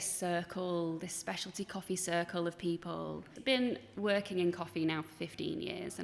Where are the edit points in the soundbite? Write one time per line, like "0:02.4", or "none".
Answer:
0:03.3
0:03.9